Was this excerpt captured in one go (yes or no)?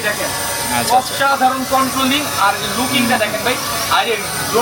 yes